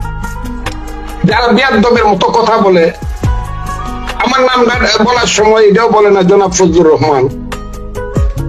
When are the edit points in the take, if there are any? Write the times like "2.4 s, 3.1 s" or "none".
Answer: none